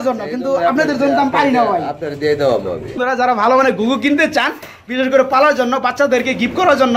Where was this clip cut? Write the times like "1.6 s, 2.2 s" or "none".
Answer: 3.0 s